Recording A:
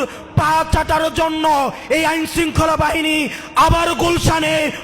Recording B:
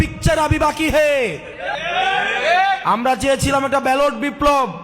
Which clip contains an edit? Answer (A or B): B